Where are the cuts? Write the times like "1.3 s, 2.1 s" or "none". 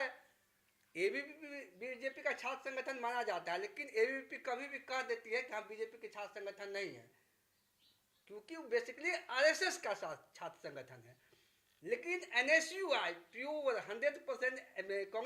none